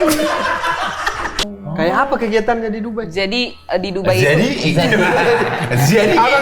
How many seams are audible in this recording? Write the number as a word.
one